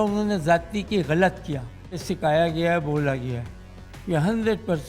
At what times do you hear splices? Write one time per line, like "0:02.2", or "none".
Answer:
0:02.0